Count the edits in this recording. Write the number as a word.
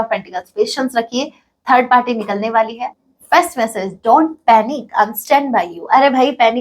one